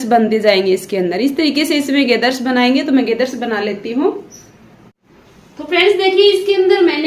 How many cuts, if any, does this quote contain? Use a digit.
0